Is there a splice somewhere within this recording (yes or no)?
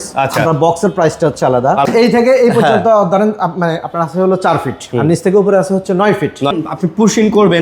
yes